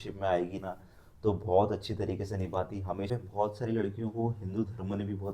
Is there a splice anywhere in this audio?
yes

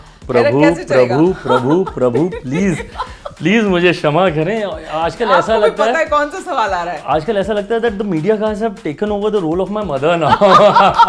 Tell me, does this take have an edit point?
no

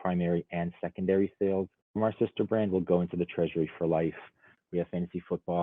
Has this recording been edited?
yes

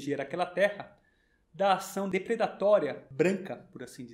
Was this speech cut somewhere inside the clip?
yes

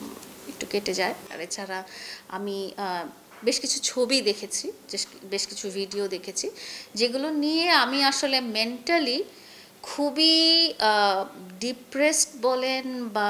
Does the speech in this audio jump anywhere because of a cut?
no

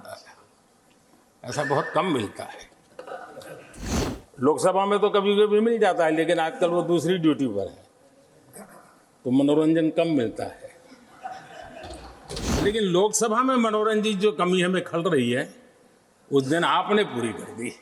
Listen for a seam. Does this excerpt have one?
yes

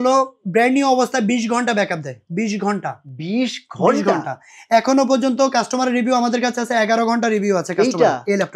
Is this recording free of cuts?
yes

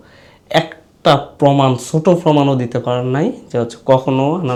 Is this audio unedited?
yes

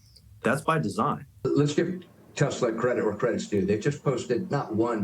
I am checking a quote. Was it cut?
yes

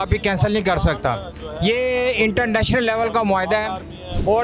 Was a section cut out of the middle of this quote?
no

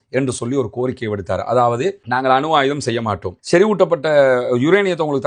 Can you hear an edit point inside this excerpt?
yes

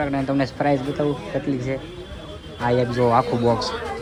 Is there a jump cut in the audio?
no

